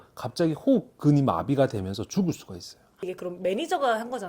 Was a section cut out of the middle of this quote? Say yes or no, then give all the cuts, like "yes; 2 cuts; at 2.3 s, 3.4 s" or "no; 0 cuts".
yes; 1 cut; at 3.0 s